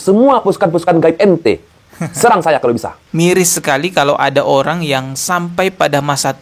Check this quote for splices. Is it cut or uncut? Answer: cut